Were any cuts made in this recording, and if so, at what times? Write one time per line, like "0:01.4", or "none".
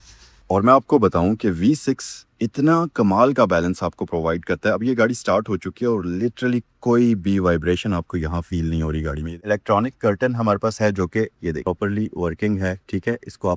0:09.3